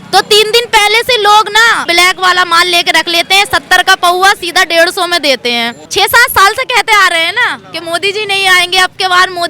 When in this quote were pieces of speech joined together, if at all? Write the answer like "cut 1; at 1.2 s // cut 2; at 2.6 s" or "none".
cut 1; at 1.9 s // cut 2; at 5.8 s